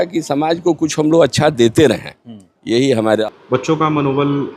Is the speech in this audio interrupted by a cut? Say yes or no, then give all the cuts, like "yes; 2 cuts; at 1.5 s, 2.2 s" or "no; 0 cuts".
yes; 1 cut; at 3.2 s